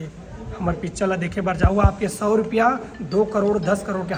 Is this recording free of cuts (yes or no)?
yes